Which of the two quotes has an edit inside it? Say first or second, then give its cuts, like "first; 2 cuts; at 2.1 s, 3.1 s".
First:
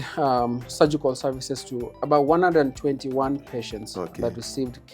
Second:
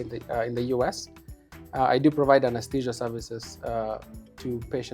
first; 1 cut; at 2.0 s